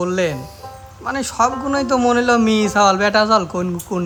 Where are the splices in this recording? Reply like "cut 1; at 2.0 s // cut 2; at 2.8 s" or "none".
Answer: none